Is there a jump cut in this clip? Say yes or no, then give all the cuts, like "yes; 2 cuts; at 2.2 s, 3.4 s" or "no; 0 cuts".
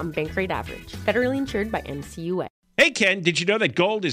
yes; 1 cut; at 2.6 s